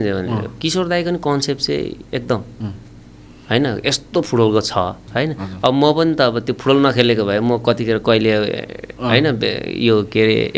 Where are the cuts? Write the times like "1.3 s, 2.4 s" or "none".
5.0 s